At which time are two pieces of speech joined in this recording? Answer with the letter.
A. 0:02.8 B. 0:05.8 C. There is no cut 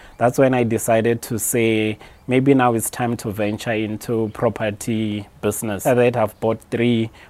B